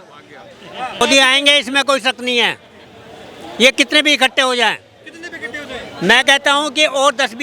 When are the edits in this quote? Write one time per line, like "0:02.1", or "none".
0:01.0